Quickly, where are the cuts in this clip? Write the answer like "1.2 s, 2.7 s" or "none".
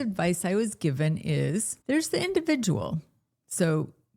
1.7 s